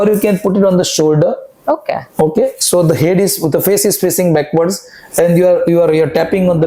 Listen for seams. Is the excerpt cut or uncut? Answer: uncut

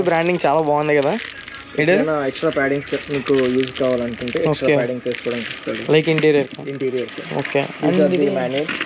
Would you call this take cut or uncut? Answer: uncut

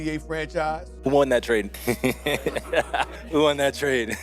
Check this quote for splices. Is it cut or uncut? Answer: cut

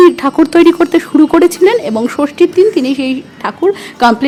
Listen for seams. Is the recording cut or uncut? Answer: uncut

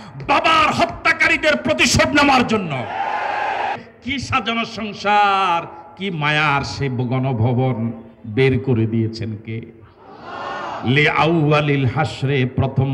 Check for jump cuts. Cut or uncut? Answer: cut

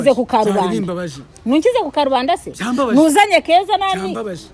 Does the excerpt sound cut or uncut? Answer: uncut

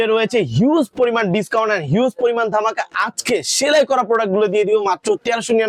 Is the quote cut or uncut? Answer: uncut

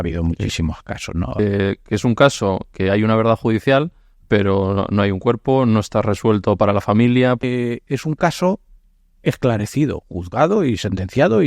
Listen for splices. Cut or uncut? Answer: cut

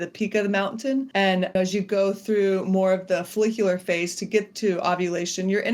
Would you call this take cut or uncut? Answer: cut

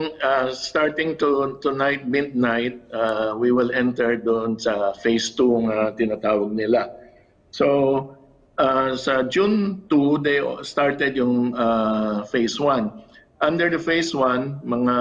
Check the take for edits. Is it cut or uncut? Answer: uncut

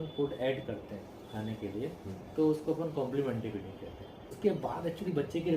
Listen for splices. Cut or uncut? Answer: cut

